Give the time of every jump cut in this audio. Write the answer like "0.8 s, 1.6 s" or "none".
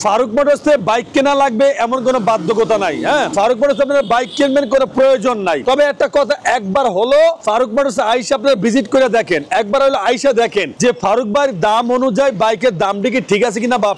none